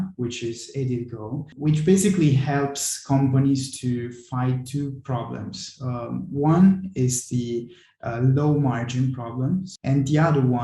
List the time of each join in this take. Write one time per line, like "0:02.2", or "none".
0:01.5
0:09.7